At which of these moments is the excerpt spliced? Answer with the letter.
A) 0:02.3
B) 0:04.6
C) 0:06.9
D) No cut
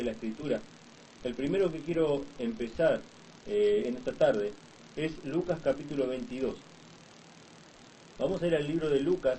B